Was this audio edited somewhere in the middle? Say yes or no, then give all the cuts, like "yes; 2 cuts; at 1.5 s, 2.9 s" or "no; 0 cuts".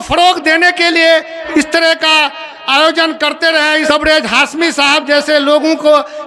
yes; 2 cuts; at 1.4 s, 3.8 s